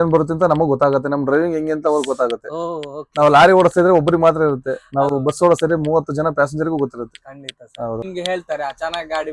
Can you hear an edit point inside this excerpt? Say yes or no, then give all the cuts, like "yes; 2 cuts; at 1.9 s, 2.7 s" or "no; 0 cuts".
no; 0 cuts